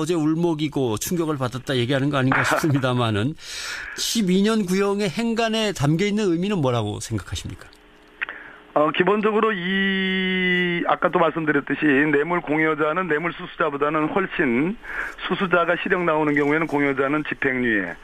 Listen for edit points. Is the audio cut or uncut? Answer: uncut